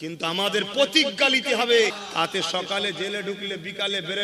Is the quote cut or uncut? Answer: cut